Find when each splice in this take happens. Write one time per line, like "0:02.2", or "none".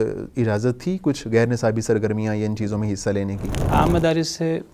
0:03.6